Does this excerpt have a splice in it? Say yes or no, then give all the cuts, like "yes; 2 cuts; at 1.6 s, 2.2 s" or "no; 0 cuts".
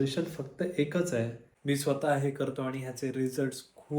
yes; 1 cut; at 1.4 s